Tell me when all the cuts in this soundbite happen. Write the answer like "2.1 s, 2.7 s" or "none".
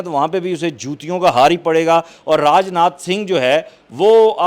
none